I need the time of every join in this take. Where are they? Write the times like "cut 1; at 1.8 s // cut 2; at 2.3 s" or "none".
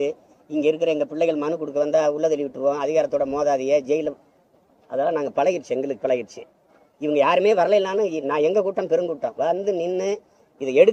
none